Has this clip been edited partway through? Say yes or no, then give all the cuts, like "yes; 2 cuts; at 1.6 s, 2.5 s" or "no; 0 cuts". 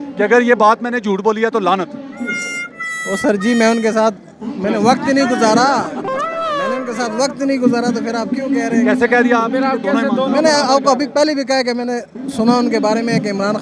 no; 0 cuts